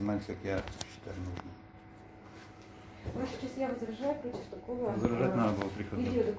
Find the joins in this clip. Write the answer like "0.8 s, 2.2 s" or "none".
none